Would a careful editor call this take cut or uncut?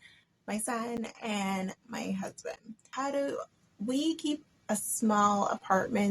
cut